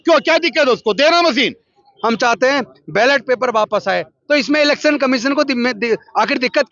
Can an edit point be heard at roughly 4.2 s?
no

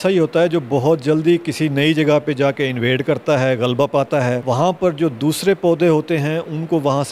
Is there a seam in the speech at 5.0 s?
no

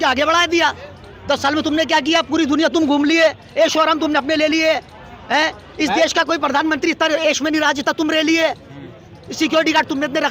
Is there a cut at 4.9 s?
no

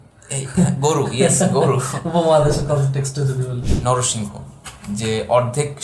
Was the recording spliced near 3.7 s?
yes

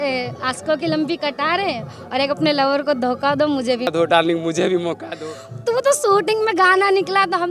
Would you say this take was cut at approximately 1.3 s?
no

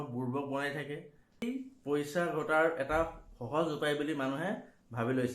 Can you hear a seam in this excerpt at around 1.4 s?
yes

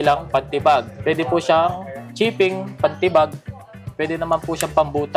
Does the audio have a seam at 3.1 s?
no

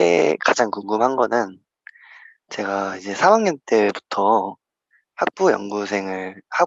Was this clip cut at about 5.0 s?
no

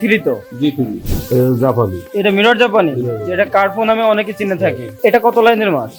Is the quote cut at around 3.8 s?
no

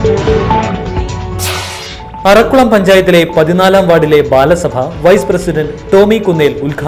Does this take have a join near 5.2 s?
no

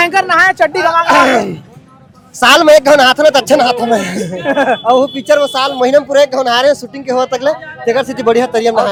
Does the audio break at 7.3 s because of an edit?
no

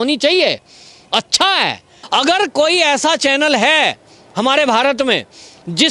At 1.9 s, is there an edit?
yes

